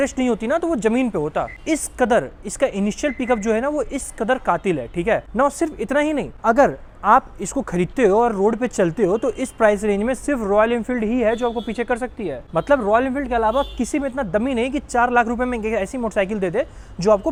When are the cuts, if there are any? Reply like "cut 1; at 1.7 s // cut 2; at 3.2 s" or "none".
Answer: none